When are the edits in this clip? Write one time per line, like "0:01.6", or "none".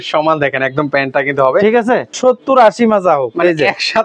0:02.1